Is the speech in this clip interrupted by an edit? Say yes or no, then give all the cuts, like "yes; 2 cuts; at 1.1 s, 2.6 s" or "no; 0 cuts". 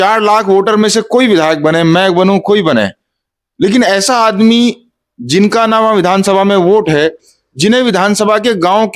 no; 0 cuts